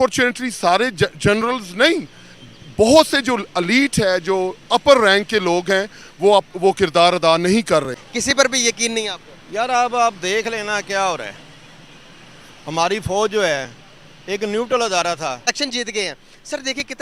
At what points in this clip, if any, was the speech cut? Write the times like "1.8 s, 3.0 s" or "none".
8.1 s, 15.5 s